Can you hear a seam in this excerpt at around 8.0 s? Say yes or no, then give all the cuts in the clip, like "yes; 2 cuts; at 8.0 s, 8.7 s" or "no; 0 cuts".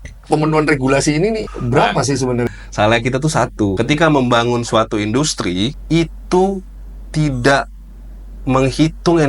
no; 4 cuts; at 1.5 s, 2.5 s, 3.8 s, 5.8 s